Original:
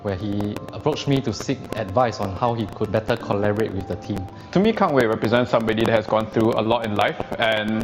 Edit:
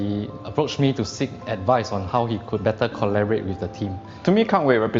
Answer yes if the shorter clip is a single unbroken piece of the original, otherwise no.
yes